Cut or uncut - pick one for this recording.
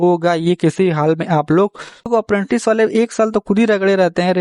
cut